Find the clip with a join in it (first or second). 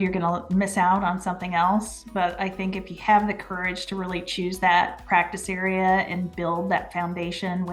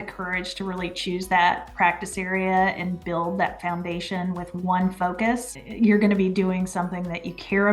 second